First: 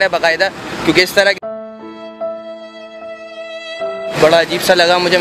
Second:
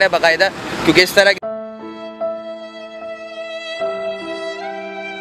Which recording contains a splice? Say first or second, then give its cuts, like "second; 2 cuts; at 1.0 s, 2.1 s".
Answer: first; 1 cut; at 4.1 s